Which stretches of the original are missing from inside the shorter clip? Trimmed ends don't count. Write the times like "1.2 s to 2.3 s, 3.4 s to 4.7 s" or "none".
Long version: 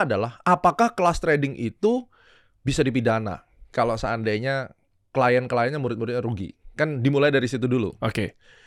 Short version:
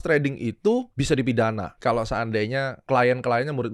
2.1 s to 2.6 s, 3.4 s to 3.6 s, 4.7 s to 5.0 s